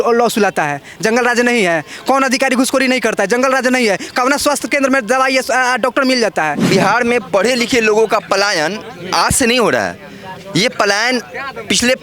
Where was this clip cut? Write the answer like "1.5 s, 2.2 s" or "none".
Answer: 6.6 s